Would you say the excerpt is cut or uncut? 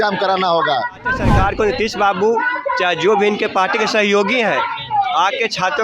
cut